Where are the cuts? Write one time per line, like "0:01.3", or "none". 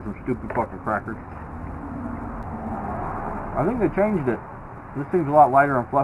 0:02.4